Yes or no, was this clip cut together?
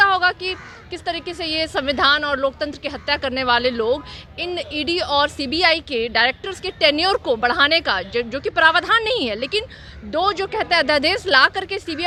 no